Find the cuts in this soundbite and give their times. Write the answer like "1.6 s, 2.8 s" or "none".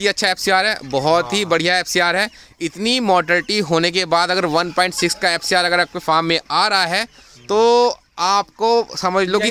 none